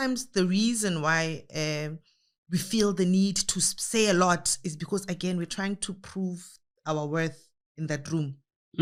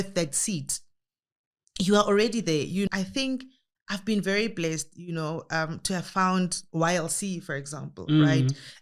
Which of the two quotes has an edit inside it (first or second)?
second